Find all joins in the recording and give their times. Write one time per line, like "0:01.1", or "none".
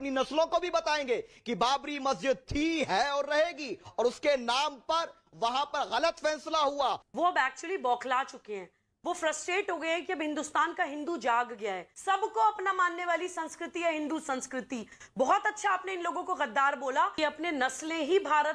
0:07.1
0:11.9
0:17.2